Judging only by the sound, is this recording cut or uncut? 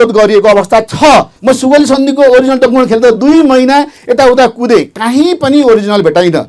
cut